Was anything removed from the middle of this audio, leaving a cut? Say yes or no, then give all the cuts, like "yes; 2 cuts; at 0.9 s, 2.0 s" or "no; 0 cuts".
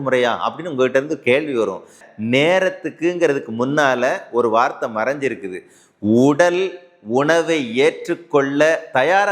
yes; 1 cut; at 2.0 s